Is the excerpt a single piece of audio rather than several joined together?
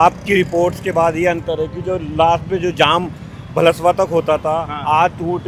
yes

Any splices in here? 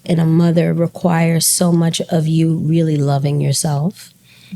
no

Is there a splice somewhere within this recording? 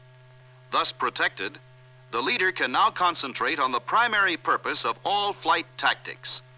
yes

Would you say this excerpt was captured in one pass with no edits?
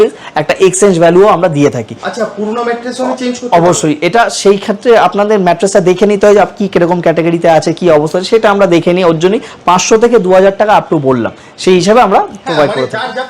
yes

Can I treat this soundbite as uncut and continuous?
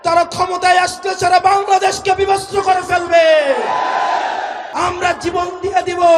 no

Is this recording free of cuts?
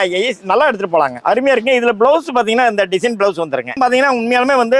no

